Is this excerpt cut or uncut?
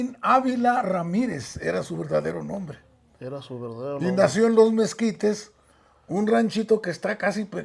uncut